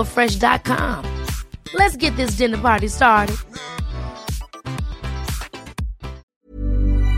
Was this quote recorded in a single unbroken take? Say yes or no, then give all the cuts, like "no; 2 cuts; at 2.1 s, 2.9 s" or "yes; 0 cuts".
no; 1 cut; at 6.2 s